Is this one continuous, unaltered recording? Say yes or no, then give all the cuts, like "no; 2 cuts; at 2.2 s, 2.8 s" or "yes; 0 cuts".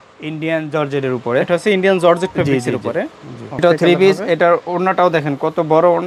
no; 1 cut; at 3.6 s